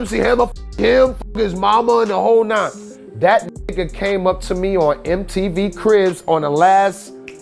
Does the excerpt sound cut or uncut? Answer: uncut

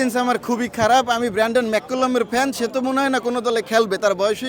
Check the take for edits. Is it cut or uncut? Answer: uncut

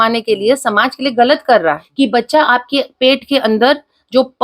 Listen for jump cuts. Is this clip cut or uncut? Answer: cut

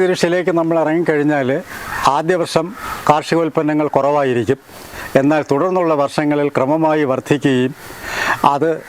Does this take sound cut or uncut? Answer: uncut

